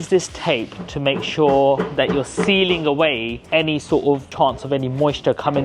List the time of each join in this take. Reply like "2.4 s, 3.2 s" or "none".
4.3 s